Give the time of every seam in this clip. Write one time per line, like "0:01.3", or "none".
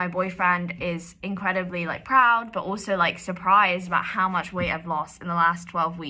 none